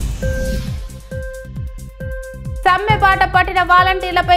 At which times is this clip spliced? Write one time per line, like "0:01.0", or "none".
none